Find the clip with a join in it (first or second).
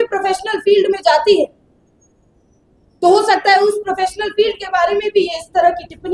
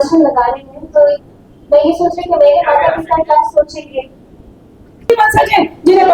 second